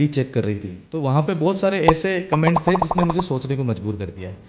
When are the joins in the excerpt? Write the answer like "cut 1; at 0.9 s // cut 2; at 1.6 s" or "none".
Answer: none